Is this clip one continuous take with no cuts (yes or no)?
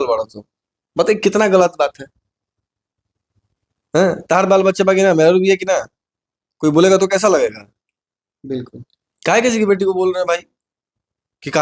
yes